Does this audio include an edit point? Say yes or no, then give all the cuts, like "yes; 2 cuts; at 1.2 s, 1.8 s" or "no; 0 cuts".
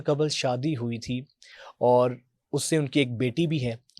no; 0 cuts